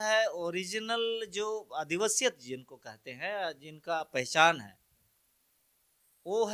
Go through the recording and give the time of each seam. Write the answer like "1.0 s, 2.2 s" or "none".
none